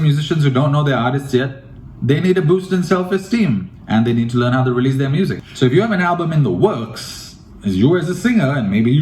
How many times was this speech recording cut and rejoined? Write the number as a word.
one